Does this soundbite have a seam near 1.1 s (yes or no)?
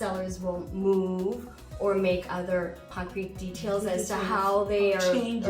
no